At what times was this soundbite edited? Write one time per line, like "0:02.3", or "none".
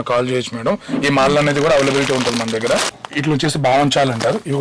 0:02.9